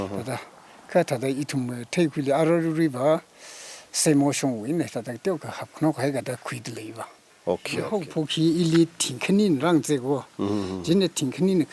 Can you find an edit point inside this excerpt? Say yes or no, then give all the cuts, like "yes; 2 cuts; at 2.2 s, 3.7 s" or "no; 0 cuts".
yes; 1 cut; at 8.0 s